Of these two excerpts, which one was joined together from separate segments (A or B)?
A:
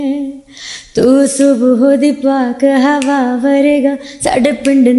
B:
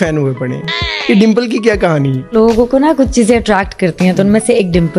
B